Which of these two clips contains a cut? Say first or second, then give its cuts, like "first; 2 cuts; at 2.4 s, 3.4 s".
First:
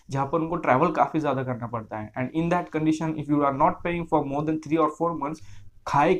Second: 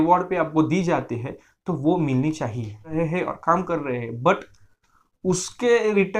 second; 1 cut; at 2.9 s